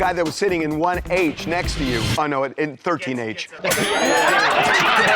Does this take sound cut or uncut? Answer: uncut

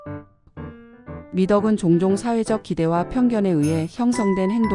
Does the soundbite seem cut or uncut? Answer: cut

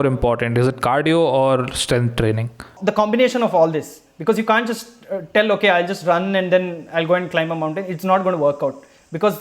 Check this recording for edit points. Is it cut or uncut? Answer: cut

